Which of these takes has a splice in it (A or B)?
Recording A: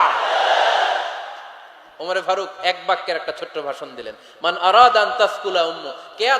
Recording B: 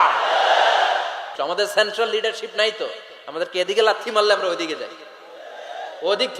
B